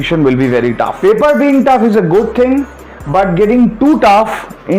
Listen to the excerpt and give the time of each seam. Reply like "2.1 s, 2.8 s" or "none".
0.9 s